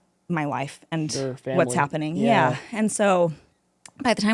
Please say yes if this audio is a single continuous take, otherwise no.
yes